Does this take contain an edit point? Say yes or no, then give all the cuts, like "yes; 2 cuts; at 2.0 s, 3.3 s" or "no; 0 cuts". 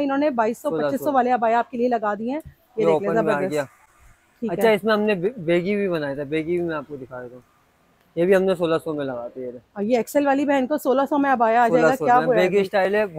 no; 0 cuts